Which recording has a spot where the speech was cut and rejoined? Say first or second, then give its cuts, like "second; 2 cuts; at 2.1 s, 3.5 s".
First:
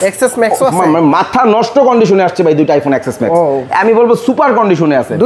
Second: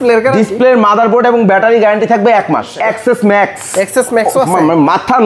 second; 1 cut; at 2.8 s